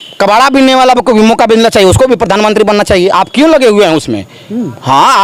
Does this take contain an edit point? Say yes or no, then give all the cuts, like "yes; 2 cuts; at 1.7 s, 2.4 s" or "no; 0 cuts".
no; 0 cuts